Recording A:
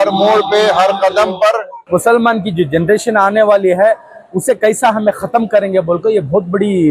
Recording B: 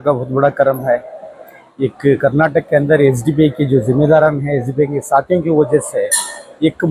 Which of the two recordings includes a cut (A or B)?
A